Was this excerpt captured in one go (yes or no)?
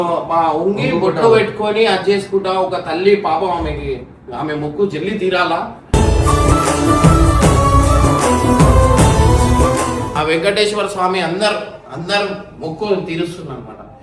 no